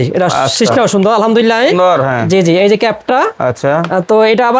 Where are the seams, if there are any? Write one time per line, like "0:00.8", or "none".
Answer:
none

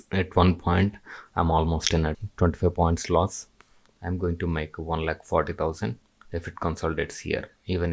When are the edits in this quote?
0:02.1
0:03.5

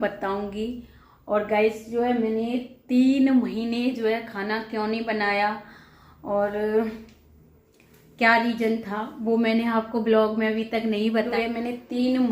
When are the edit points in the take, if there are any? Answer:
0:11.3

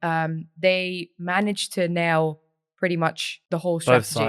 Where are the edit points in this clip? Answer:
0:03.3

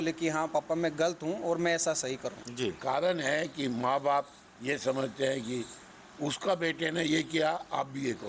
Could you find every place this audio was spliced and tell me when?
0:02.4

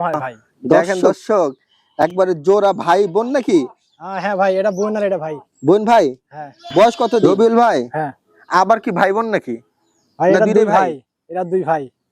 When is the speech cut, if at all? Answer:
0:00.8
0:07.2

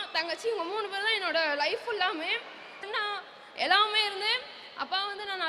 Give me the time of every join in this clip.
0:02.8

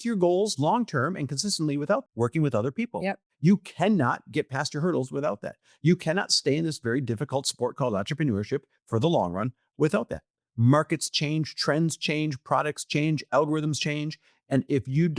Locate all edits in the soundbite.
0:02.1
0:03.2

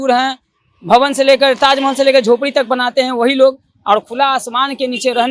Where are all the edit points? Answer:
none

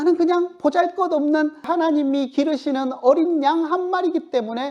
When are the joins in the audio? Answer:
0:01.7

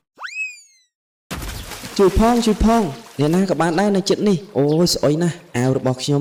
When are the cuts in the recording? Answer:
none

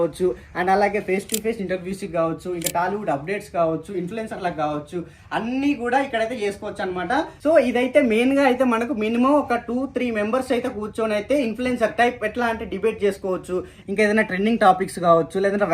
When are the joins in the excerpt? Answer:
none

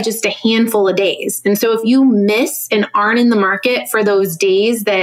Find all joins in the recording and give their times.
none

